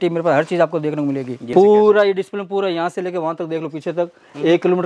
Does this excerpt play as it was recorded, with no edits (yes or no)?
no